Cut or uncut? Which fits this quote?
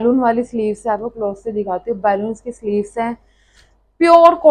uncut